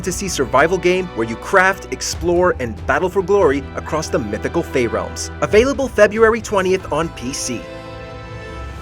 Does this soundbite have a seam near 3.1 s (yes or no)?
no